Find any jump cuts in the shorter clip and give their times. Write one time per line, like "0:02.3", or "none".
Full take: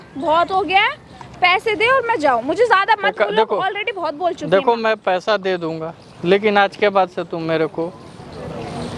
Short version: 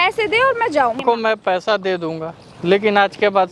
0:01.0